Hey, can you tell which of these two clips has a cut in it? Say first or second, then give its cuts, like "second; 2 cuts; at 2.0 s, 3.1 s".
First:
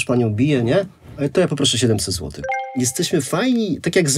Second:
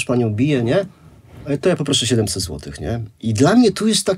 first; 2 cuts; at 1.0 s, 2.6 s